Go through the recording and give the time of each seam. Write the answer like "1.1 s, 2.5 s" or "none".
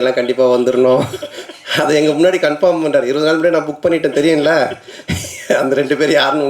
none